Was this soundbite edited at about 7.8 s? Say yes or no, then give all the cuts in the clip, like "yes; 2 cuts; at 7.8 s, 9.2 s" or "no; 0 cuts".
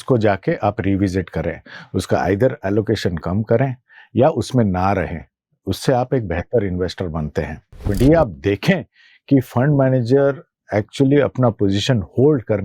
yes; 1 cut; at 7.8 s